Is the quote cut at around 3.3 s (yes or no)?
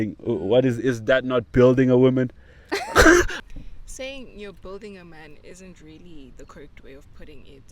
yes